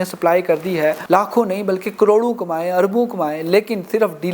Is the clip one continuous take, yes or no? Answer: no